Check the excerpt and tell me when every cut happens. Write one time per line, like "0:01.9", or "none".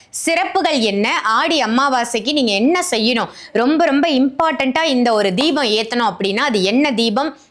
none

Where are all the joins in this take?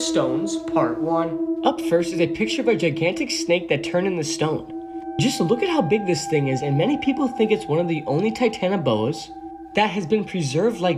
none

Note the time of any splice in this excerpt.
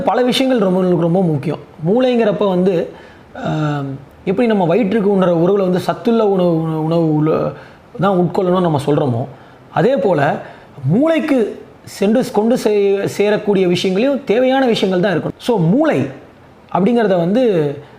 0:15.3

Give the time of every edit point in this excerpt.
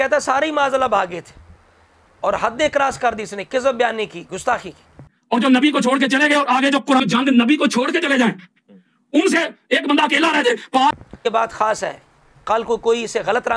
0:01.6
0:05.1
0:11.0

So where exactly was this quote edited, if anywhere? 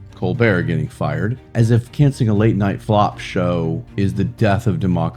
0:01.4
0:02.8
0:03.9

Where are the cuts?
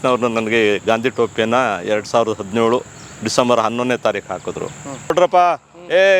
0:05.1

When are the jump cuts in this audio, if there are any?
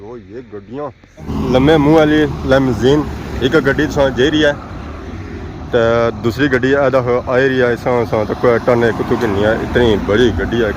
0:01.3

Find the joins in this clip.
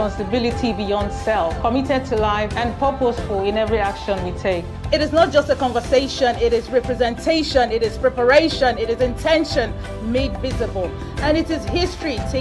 none

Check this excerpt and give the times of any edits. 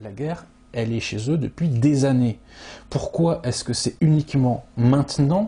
none

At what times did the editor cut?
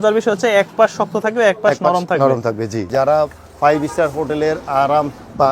0:02.9

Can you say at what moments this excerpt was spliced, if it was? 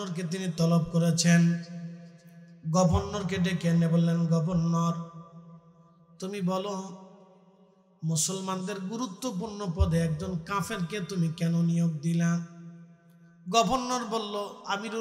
none

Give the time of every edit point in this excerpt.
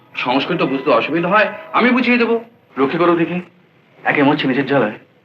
0:02.6

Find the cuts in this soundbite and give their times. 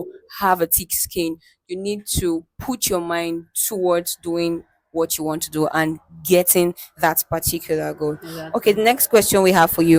none

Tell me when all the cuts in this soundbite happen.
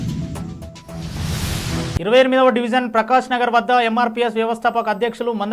0:02.0

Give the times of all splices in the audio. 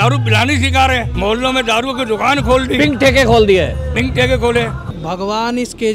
0:01.1
0:04.9

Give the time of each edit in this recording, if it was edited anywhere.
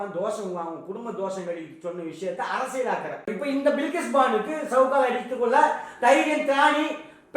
0:03.3

